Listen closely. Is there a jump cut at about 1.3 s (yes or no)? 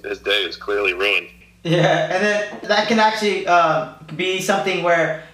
no